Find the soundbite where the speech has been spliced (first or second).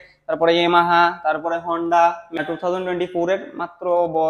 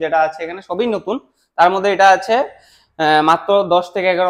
first